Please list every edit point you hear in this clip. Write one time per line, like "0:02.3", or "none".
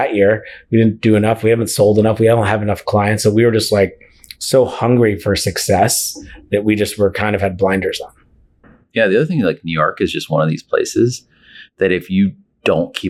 none